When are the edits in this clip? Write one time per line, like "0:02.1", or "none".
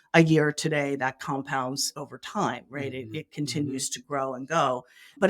0:01.9

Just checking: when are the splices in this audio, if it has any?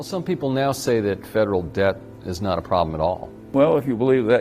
0:03.3

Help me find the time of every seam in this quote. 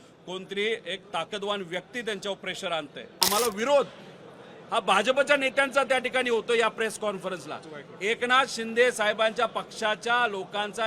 0:03.2

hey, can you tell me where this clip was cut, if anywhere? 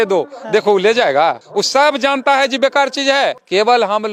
none

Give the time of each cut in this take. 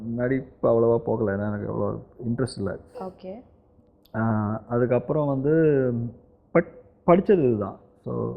none

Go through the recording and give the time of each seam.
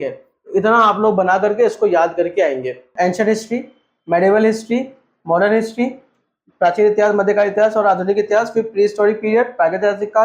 0:02.9

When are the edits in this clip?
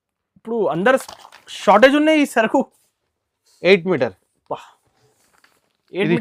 none

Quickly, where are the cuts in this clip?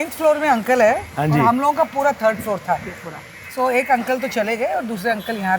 0:03.4

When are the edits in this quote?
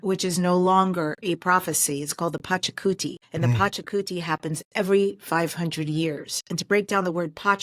0:03.2

